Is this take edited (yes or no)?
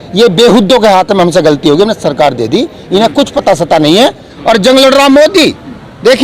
yes